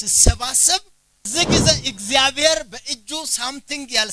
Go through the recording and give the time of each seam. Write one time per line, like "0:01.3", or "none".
0:01.3